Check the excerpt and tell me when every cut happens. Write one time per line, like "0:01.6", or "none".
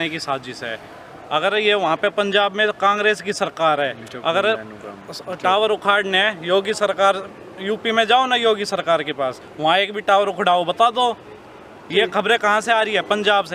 none